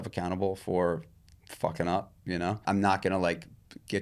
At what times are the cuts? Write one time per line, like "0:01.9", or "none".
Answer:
0:02.6